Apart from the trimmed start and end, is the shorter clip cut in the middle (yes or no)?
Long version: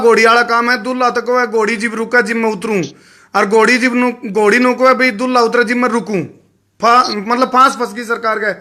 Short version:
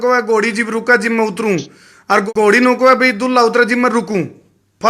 yes